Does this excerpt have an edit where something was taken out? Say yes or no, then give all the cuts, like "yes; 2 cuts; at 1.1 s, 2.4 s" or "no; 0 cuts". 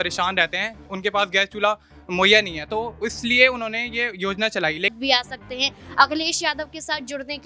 yes; 1 cut; at 4.9 s